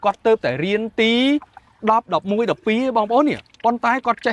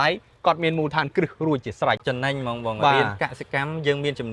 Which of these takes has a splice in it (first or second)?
second